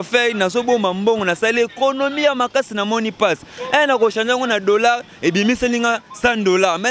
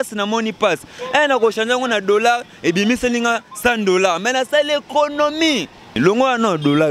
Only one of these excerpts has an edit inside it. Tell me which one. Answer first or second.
second